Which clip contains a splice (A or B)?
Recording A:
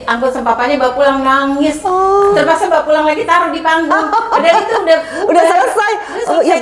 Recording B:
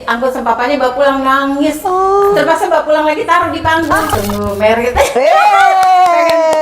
B